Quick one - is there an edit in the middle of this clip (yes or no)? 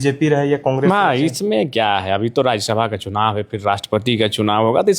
no